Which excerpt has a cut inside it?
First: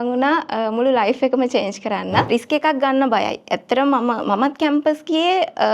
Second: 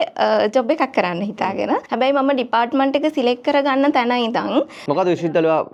first; 1 cut; at 2.3 s

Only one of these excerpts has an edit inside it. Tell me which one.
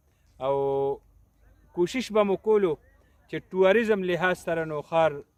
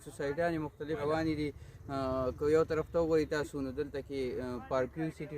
second; 1 cut; at 1.0 s

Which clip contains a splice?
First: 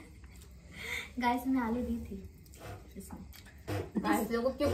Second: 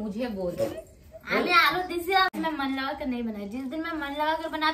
second; 1 cut; at 2.3 s

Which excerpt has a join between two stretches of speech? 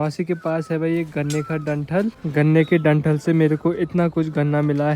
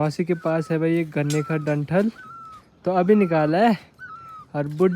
first; 1 cut; at 2.2 s

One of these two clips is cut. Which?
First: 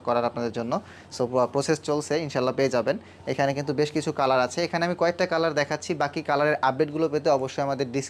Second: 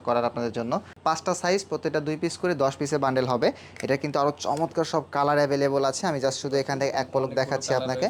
second; 1 cut; at 0.9 s

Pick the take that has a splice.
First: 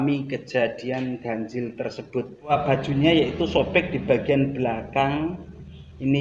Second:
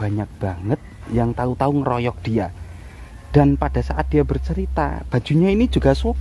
first; 1 cut; at 2.5 s

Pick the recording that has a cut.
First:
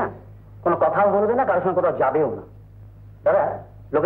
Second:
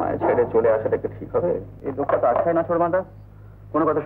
second; 1 cut; at 1.8 s

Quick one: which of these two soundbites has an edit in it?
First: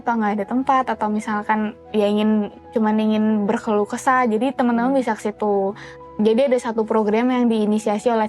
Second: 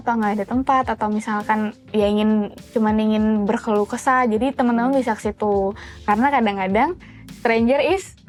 first; 1 cut; at 5.9 s

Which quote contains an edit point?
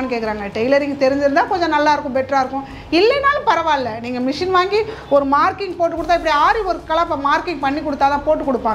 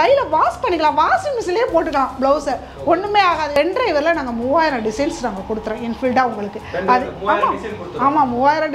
second; 1 cut; at 3.6 s

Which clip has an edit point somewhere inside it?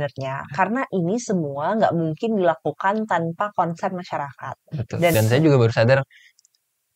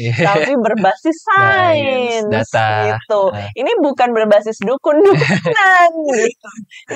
first; 1 cut; at 5.1 s

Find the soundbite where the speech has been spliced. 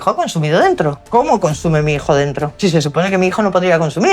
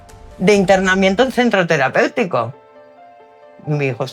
first; 2 cuts; at 1.0 s, 2.5 s

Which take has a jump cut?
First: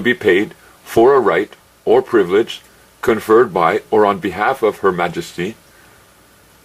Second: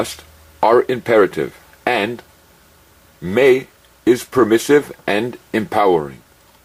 first; 1 cut; at 5.3 s

